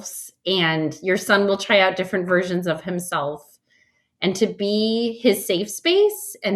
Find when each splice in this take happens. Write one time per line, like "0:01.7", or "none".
none

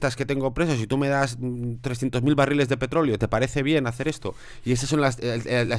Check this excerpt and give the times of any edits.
none

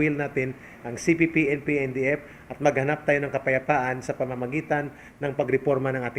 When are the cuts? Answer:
none

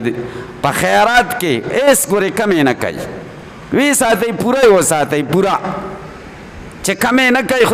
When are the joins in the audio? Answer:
none

